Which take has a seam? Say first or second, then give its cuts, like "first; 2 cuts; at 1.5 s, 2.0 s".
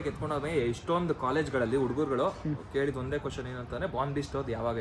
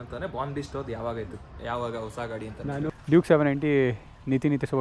second; 1 cut; at 2.9 s